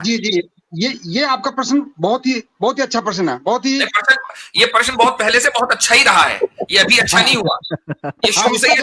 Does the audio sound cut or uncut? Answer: uncut